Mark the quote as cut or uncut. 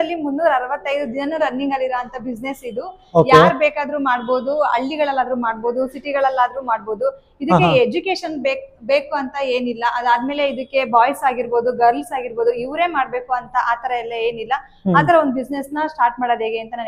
uncut